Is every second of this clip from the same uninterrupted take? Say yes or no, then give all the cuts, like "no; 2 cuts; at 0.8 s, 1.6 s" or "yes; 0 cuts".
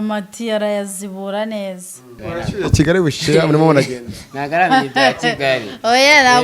no; 1 cut; at 2.1 s